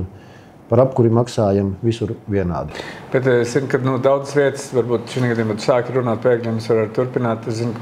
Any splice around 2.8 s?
no; 0 cuts

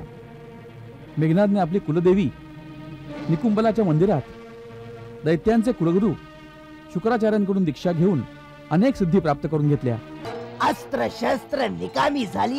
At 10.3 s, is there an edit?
yes; 1 cut; at 10.3 s

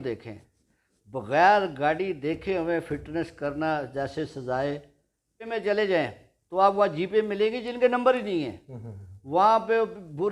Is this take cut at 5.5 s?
yes; 1 cut; at 5.5 s

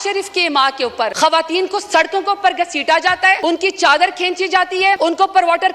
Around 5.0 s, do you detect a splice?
yes; 3 cuts; at 1.1 s, 3.4 s, 5.0 s

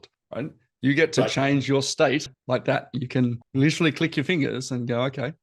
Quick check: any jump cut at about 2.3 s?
yes; 1 cut; at 2.3 s

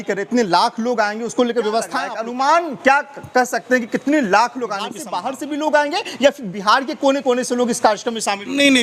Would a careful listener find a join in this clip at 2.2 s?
yes; 2 cuts; at 2.2 s, 5.0 s

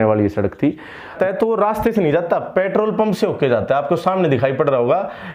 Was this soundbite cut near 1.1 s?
yes; 1 cut; at 1.1 s

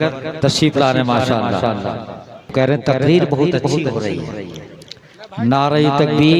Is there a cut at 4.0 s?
no; 1 cut; at 2.5 s

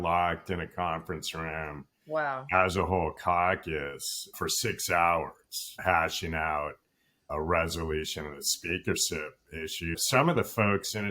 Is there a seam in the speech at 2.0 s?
no; 1 cut; at 4.3 s

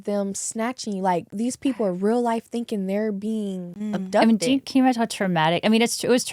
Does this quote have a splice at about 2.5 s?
no; 2 cuts; at 1.3 s, 3.7 s

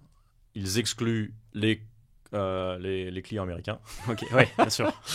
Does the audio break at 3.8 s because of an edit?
no; 1 cut; at 1.4 s

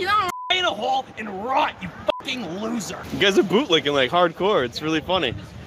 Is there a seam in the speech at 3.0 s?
yes; 1 cut; at 3.0 s

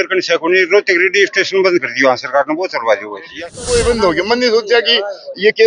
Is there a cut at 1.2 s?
no; 1 cut; at 3.4 s

